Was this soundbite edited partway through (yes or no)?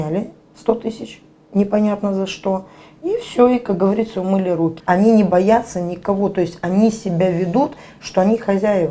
yes